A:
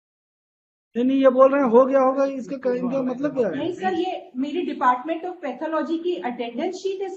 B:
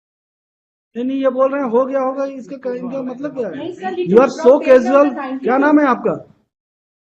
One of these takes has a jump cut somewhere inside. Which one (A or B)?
B